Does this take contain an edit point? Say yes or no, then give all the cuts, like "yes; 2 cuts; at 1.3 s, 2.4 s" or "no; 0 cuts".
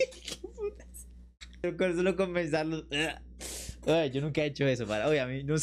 no; 0 cuts